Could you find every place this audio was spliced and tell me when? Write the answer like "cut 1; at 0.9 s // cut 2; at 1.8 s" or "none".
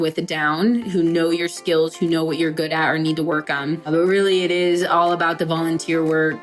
cut 1; at 3.9 s